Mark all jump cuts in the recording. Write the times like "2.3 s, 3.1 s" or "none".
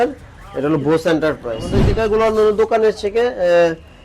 1.8 s